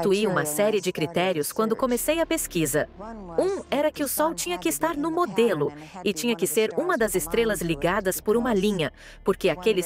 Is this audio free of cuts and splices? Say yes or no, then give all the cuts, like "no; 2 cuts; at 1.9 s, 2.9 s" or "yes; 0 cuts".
yes; 0 cuts